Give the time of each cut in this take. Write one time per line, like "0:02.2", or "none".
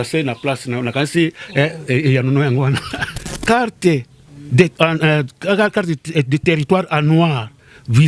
0:03.2